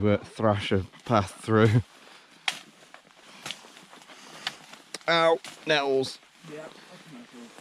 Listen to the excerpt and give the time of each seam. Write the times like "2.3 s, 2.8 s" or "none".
3.2 s